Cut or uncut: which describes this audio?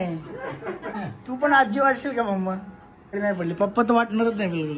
cut